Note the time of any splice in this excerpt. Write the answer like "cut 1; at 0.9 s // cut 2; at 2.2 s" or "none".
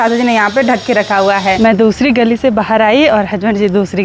cut 1; at 1.6 s